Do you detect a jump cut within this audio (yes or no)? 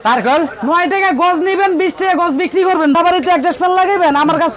yes